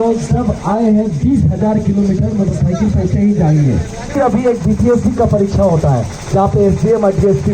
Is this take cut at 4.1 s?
yes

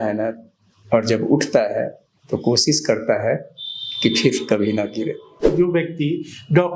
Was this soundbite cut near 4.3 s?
no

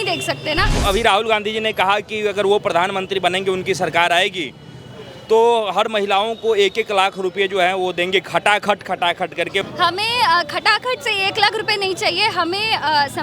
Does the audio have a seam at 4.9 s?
no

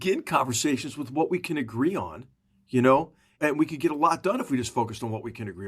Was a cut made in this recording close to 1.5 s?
no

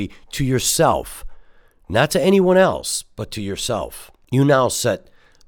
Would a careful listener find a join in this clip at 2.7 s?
no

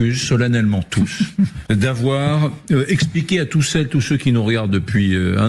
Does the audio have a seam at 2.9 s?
no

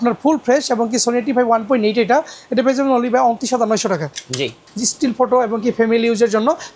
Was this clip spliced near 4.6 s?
yes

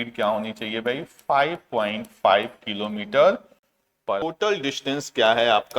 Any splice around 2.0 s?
no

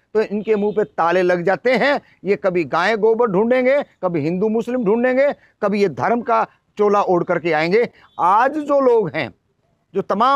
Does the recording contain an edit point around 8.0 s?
no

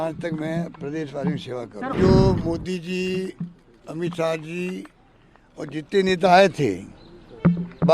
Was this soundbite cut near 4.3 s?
no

